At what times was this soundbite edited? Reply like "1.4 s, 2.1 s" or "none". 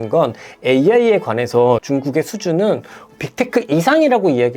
1.8 s